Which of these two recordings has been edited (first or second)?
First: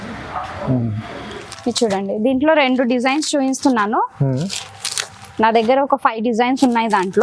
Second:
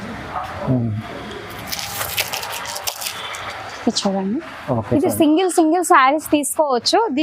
first